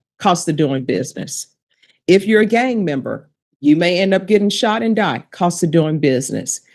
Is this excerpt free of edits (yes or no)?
yes